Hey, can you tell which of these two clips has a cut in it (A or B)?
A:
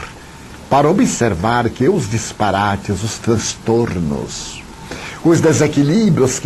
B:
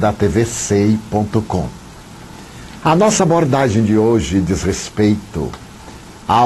B